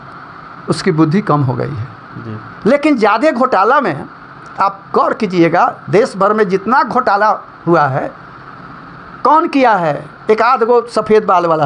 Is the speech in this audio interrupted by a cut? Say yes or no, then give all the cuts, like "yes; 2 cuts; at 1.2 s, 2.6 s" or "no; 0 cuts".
no; 0 cuts